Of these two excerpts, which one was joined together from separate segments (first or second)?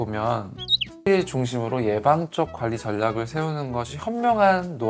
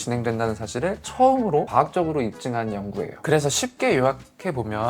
second